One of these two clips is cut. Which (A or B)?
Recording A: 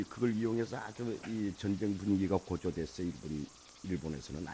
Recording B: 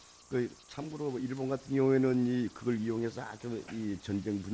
B